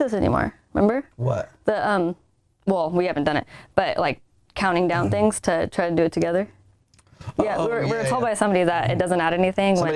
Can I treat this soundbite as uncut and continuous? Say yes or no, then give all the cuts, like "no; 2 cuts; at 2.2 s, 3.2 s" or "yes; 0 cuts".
yes; 0 cuts